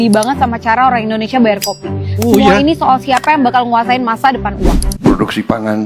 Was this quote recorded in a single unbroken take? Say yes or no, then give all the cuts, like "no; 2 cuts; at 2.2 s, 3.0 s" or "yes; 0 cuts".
no; 1 cut; at 4.9 s